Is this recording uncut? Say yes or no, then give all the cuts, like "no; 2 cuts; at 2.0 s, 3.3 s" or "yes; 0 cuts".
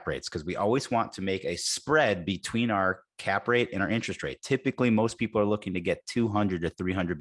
yes; 0 cuts